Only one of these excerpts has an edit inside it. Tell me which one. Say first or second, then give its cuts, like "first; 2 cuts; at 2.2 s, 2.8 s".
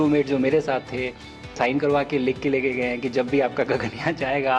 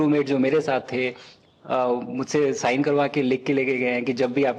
first; 1 cut; at 1.5 s